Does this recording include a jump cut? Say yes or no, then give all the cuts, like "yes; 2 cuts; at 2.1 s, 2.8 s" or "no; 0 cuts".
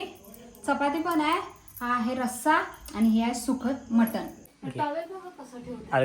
yes; 1 cut; at 4.4 s